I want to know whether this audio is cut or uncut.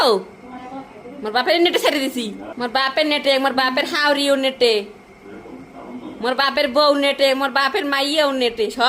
cut